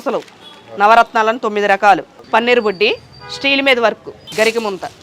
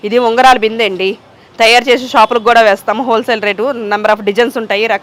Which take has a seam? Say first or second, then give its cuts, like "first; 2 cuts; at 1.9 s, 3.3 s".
first; 2 cuts; at 2.1 s, 4.1 s